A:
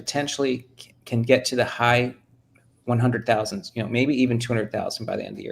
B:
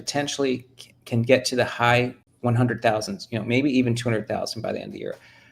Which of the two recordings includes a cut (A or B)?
B